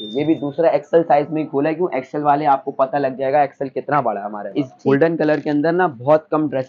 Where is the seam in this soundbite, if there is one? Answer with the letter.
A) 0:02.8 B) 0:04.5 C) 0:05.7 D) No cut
B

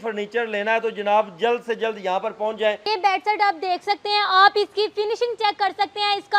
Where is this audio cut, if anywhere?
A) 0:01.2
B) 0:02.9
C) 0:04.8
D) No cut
B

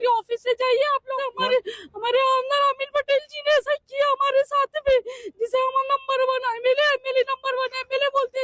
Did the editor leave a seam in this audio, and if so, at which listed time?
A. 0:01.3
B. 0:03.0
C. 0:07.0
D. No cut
A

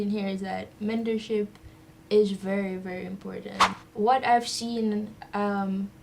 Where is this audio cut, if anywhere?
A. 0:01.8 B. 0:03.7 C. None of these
B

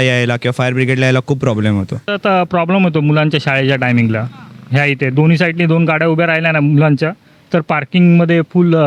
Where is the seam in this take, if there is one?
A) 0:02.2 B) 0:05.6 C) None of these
A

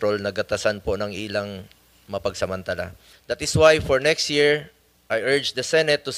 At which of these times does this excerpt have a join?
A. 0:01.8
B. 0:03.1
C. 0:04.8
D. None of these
B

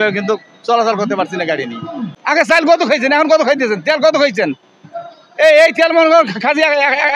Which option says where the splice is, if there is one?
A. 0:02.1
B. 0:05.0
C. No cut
A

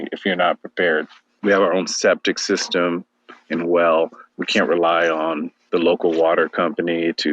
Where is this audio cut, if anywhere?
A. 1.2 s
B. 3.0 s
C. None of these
A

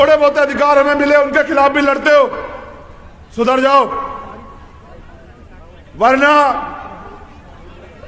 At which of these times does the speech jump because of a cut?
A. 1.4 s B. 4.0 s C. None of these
C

